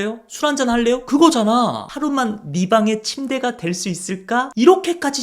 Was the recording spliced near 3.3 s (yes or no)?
no